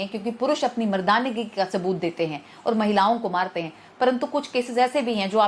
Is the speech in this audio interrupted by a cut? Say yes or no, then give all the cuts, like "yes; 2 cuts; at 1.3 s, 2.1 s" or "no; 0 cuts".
no; 0 cuts